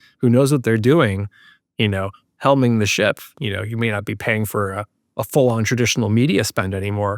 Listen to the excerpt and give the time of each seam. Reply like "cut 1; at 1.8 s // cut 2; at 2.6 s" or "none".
cut 1; at 3.3 s